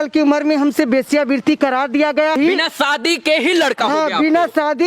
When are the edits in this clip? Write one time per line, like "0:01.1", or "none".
0:02.4